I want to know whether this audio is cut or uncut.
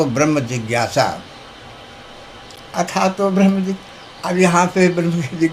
cut